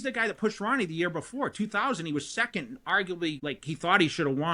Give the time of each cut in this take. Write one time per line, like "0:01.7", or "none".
0:03.4